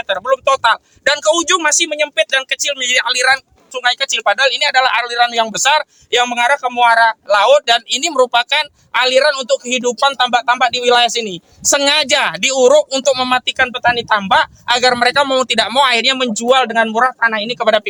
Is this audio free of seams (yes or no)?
yes